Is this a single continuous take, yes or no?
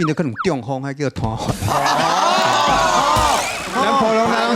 yes